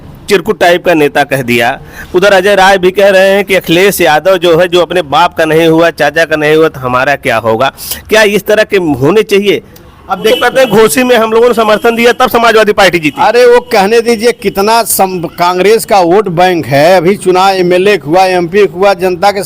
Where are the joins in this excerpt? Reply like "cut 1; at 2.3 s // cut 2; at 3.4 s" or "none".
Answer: cut 1; at 10.3 s

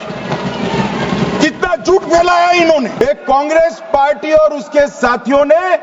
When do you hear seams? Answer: cut 1; at 3.0 s

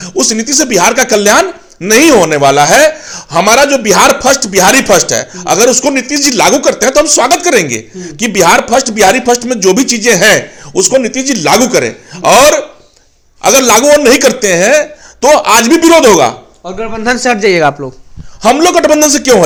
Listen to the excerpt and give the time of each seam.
none

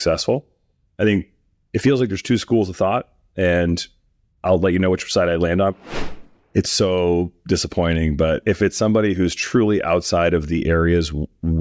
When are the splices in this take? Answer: cut 1; at 5.9 s

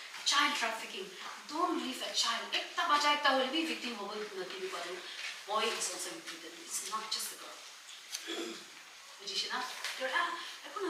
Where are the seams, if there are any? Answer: none

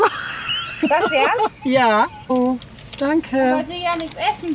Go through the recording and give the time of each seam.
cut 1; at 2.3 s

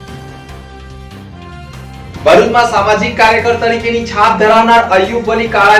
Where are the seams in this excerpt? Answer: cut 1; at 0.9 s

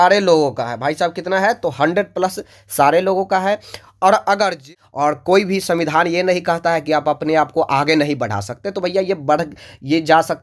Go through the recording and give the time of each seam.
cut 1; at 4.6 s

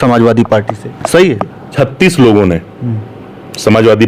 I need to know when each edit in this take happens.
cut 1; at 1.6 s

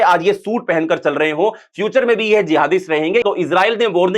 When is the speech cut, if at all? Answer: cut 1; at 3.2 s

